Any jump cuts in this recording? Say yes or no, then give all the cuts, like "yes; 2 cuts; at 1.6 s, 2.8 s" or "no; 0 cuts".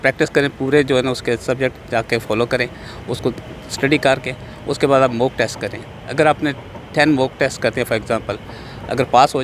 no; 0 cuts